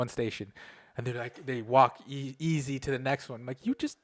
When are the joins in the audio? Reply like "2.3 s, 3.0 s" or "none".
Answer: none